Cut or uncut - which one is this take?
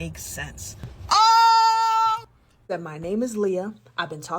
cut